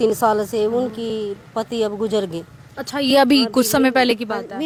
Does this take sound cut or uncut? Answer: uncut